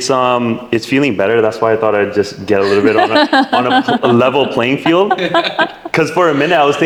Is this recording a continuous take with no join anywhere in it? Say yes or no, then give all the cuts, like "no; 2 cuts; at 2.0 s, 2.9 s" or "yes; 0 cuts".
yes; 0 cuts